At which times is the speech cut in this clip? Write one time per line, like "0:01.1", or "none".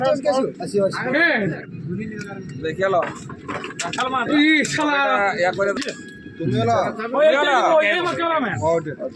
0:01.6

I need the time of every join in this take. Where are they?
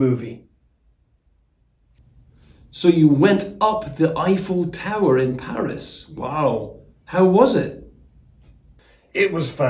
0:01.8

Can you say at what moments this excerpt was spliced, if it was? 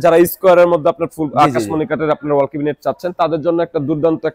none

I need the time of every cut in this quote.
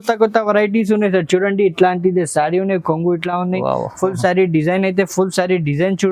none

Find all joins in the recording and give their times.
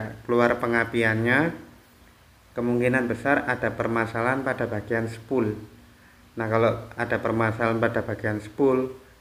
none

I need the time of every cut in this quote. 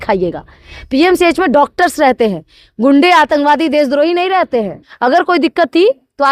0:04.8

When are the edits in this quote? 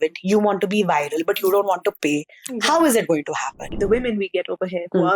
0:03.7

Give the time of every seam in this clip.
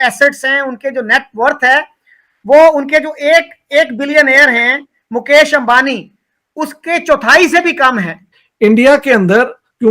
0:08.3

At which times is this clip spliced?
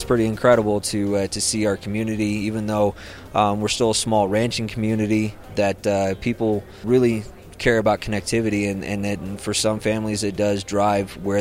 0:05.4
0:06.8

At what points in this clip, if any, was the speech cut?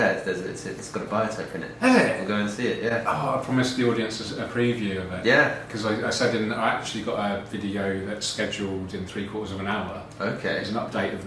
none

